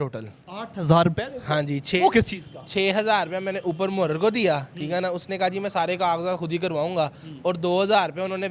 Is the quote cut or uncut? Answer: uncut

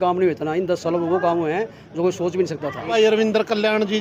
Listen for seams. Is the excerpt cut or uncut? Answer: cut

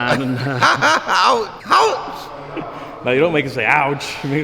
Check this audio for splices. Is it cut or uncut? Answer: cut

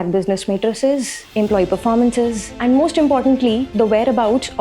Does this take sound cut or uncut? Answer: cut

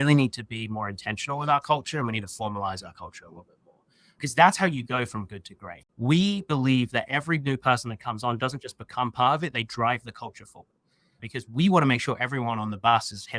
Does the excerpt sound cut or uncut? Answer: cut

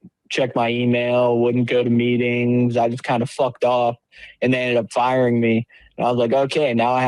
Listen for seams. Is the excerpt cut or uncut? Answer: uncut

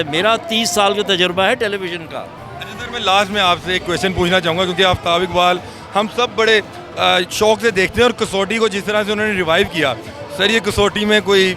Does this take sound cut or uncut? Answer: uncut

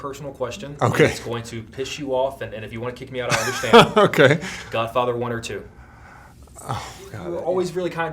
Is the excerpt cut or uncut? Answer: cut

